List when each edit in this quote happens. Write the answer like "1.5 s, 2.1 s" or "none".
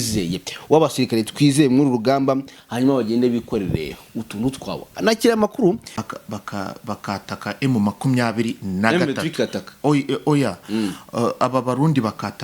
5.9 s